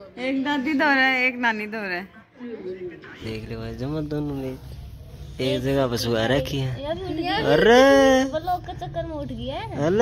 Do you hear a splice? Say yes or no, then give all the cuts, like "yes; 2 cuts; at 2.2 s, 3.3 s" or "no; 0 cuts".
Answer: yes; 1 cut; at 3.2 s